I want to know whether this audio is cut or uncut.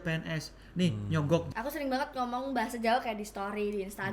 cut